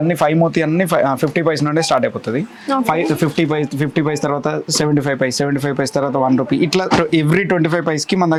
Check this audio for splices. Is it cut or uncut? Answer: uncut